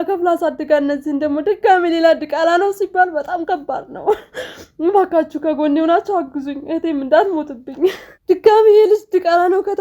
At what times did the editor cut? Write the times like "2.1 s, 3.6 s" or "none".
none